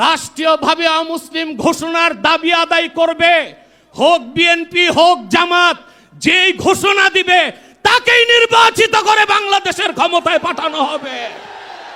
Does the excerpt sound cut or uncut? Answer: uncut